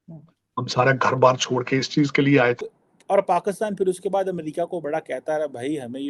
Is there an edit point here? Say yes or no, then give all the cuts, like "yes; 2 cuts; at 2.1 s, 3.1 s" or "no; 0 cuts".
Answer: yes; 1 cut; at 2.7 s